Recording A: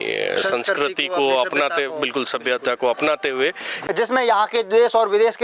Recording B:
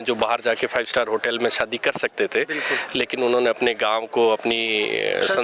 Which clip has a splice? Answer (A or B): A